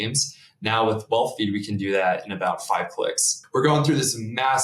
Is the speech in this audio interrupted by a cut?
yes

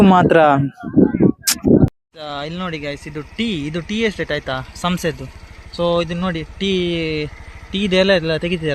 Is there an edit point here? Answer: yes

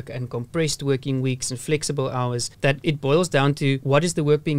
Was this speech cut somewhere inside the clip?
no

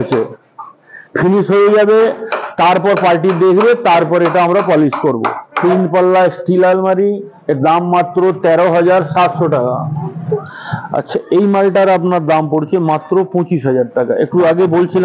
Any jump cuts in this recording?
yes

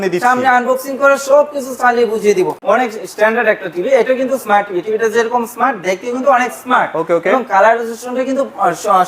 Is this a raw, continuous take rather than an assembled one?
no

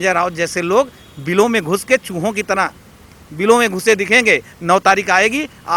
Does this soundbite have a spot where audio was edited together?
no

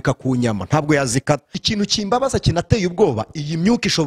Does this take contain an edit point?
yes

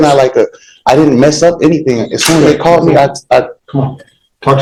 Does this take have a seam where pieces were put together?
no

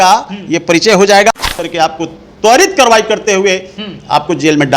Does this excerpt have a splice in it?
yes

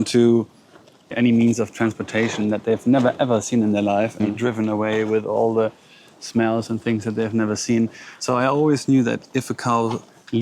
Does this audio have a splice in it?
no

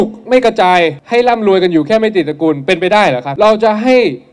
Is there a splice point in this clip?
yes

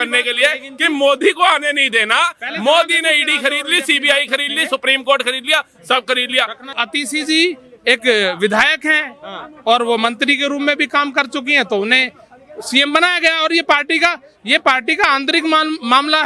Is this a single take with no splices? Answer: no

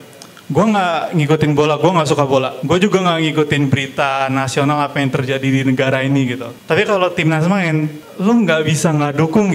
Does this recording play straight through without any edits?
no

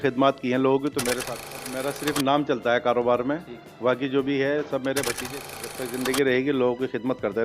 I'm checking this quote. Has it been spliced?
yes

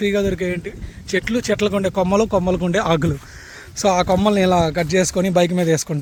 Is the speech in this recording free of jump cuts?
yes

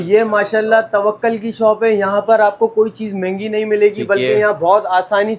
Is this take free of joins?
yes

